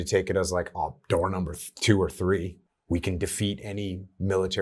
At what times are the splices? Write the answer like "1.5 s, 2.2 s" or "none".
2.5 s